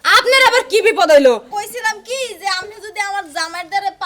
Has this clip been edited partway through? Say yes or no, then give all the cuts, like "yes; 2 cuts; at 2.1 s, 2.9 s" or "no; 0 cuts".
yes; 1 cut; at 1.5 s